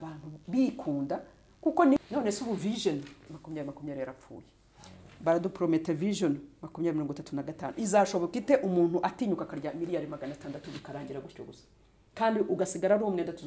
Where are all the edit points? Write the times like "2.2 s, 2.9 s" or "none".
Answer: 2.0 s, 3.4 s